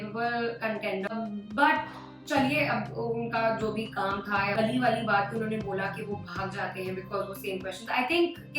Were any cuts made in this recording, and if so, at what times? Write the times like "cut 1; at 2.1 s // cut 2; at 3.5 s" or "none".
cut 1; at 1.1 s // cut 2; at 4.5 s